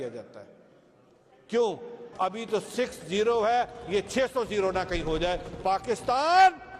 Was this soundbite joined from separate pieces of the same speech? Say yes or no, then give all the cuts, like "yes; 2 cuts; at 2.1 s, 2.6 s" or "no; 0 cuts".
yes; 1 cut; at 2.0 s